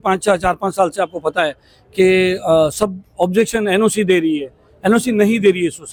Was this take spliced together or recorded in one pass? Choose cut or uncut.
uncut